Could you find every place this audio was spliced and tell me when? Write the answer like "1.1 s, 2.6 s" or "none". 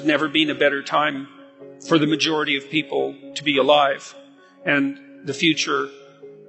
none